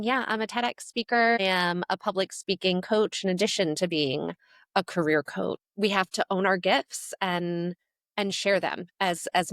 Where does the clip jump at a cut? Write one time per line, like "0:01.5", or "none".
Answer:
0:01.4
0:05.6